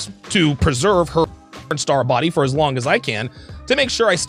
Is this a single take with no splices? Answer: yes; 0 cuts

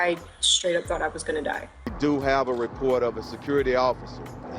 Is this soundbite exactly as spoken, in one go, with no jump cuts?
no; 1 cut; at 1.6 s

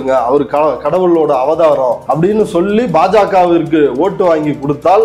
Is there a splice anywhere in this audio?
yes; 1 cut; at 2.0 s

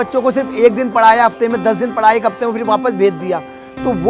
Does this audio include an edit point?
no; 0 cuts

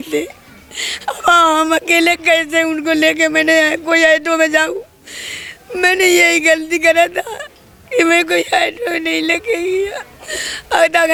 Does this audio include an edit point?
no; 0 cuts

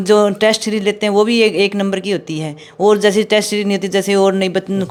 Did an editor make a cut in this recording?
no; 0 cuts

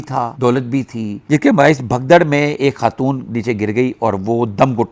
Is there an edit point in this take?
yes; 1 cut; at 1.1 s

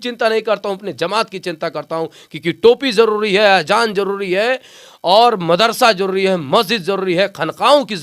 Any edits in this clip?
no; 0 cuts

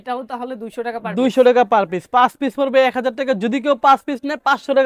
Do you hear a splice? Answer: no; 0 cuts

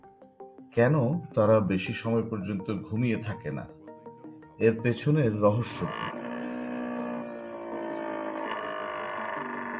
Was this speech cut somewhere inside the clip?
no; 0 cuts

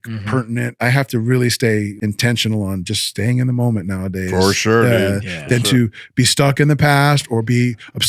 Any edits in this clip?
yes; 2 cuts; at 0.8 s, 1.9 s

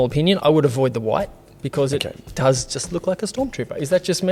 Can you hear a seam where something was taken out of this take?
no; 0 cuts

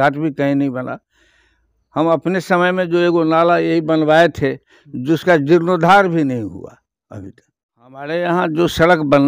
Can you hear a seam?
yes; 1 cut; at 8.1 s

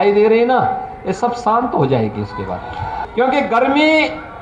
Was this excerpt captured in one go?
no; 1 cut; at 3.0 s

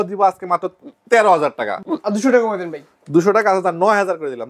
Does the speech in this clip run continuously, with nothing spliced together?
no; 1 cut; at 1.8 s

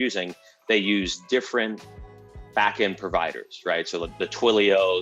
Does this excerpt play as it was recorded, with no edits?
yes; 0 cuts

